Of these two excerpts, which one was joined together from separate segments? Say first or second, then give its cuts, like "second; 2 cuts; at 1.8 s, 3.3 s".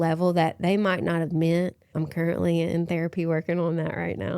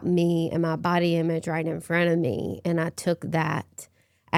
first; 1 cut; at 2.0 s